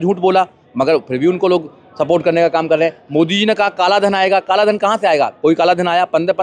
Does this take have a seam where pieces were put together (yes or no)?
no